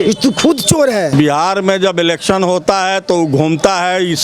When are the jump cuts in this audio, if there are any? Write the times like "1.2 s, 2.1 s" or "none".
1.1 s